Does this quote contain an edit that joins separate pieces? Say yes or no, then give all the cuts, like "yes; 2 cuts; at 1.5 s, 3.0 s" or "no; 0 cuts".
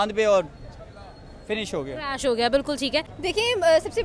no; 0 cuts